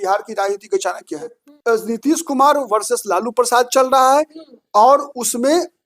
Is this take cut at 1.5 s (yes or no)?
yes